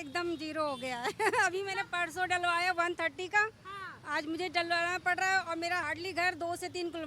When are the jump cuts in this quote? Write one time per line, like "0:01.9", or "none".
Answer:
0:05.8